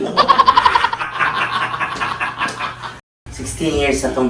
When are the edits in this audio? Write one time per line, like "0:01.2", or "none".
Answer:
0:03.2